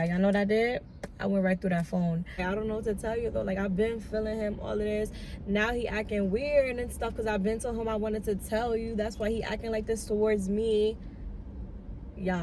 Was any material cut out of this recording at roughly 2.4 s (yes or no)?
yes